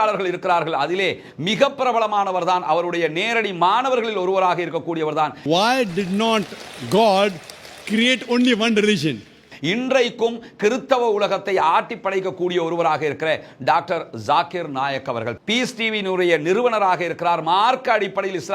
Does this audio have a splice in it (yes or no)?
no